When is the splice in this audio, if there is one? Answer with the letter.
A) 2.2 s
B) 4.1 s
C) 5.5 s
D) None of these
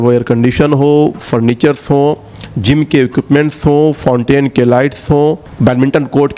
C